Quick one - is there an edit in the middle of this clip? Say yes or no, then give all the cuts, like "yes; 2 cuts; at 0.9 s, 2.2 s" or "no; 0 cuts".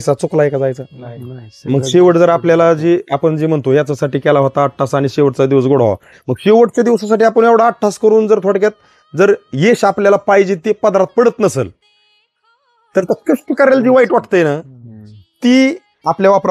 no; 0 cuts